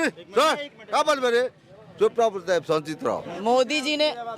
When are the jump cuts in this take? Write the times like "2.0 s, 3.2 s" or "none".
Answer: 3.3 s